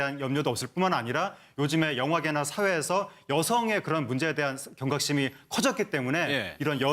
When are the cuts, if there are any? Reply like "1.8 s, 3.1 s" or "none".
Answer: 2.2 s